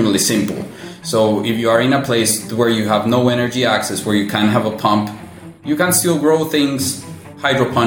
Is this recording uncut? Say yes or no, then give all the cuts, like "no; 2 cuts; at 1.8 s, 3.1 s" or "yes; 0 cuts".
yes; 0 cuts